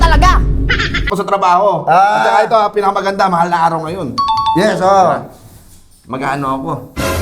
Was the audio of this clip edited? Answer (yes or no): yes